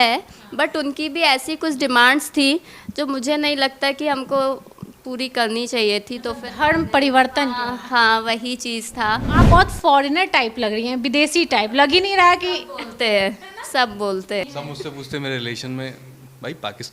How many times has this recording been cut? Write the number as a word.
two